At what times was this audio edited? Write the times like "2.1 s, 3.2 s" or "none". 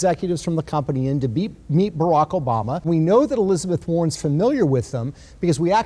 2.8 s